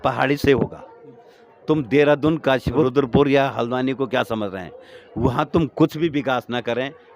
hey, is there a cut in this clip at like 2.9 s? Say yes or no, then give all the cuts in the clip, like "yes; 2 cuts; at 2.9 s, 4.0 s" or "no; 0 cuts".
yes; 1 cut; at 2.9 s